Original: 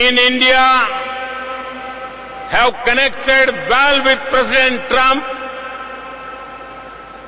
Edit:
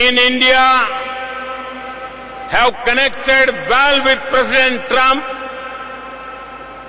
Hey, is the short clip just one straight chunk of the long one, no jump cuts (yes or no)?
yes